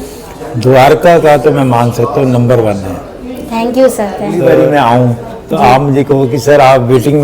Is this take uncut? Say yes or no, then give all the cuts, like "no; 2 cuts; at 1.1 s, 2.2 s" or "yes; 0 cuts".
no; 1 cut; at 4.3 s